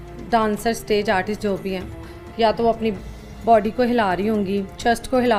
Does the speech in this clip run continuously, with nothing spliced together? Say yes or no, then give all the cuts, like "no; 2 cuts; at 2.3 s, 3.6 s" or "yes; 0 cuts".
yes; 0 cuts